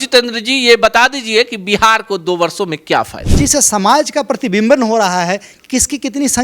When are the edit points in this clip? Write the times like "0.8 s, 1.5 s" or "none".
3.2 s